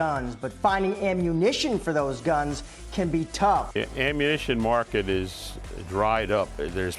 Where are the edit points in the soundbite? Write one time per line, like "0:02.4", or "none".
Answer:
none

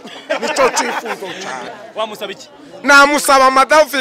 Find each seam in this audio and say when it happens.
0:01.7

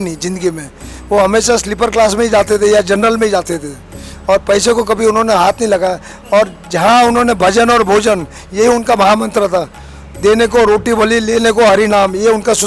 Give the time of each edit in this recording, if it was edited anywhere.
none

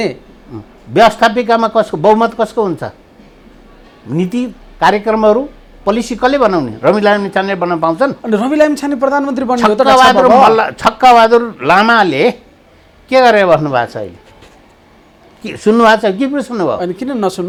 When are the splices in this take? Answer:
none

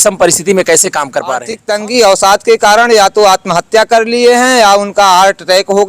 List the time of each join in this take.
0:01.6

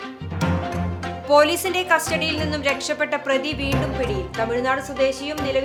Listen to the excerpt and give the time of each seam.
none

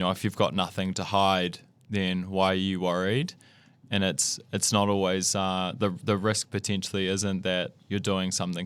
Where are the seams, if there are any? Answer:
none

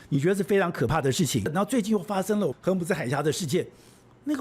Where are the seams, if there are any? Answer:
0:01.5
0:02.6

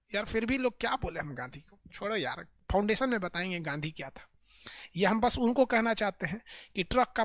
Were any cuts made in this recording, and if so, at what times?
none

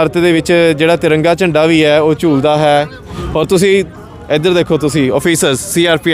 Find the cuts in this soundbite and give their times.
none

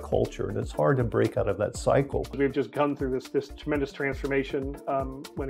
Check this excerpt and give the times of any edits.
0:02.4

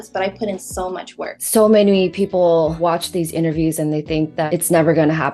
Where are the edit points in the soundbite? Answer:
0:01.4
0:02.8
0:04.5

